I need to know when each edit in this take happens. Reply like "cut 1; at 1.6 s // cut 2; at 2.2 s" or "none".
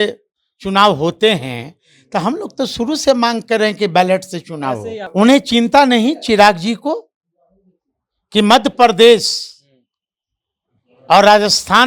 cut 1; at 5.0 s